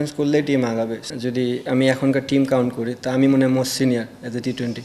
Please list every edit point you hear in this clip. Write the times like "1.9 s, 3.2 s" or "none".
1.0 s